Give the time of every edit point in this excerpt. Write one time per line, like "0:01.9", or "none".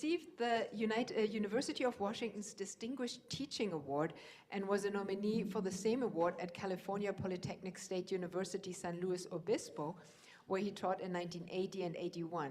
0:02.1